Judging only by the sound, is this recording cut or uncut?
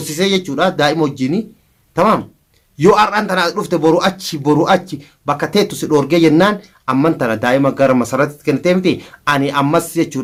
uncut